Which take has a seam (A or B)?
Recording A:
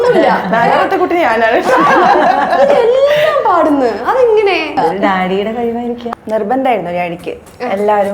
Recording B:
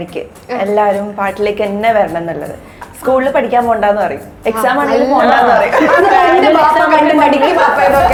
A